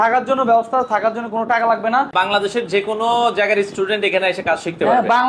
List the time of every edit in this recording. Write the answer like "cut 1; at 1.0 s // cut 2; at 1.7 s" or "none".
cut 1; at 2.1 s